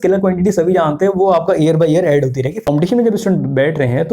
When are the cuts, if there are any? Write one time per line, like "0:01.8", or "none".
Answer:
0:02.6